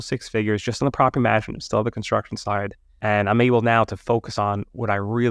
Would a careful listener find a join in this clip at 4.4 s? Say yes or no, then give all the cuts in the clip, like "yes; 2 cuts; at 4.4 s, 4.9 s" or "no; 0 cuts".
no; 1 cut; at 2.8 s